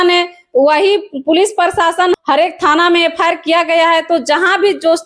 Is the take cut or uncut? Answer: cut